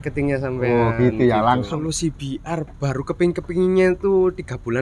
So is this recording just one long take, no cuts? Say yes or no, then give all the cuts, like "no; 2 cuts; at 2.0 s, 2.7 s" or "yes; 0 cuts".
no; 1 cut; at 1.7 s